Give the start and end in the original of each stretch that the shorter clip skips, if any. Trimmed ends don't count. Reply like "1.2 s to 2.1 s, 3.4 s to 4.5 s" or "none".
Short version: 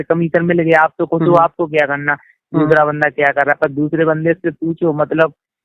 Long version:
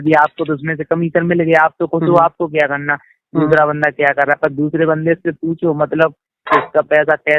none